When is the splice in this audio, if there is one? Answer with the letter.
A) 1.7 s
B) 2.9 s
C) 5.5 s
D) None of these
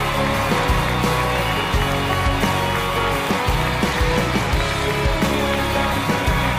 B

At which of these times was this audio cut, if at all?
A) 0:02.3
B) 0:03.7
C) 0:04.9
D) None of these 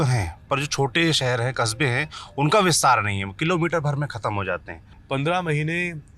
C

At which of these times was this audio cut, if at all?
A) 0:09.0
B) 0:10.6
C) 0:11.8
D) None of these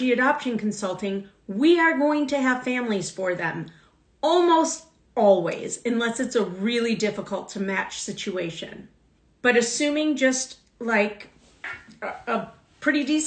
D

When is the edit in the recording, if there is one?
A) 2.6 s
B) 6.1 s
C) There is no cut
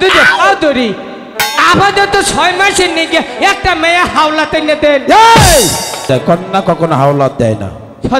B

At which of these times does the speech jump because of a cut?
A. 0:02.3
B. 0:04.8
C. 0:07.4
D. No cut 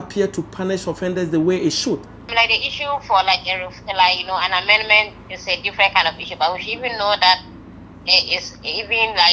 A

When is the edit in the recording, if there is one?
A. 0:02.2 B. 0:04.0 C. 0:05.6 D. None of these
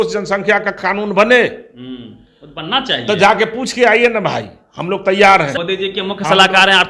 C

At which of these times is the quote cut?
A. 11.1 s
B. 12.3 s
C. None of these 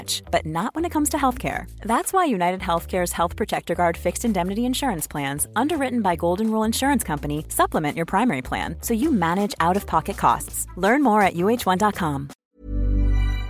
B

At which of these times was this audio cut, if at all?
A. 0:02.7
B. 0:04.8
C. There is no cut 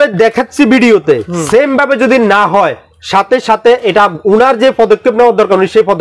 C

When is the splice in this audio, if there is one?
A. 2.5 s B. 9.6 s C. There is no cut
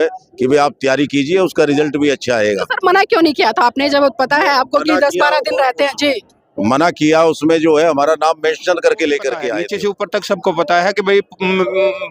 B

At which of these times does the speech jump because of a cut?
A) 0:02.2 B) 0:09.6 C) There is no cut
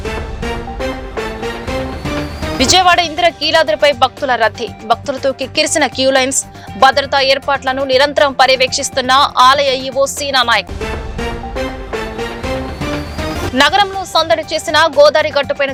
C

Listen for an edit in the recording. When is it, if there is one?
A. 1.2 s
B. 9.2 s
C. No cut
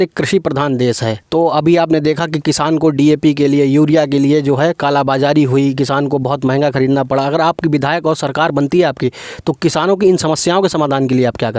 A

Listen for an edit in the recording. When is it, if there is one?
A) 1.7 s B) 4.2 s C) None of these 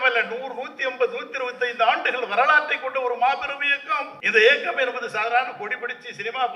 B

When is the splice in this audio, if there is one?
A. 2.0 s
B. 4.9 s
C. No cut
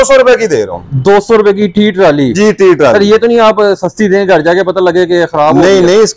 C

